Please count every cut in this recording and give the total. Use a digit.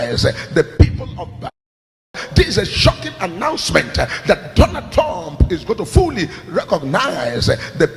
1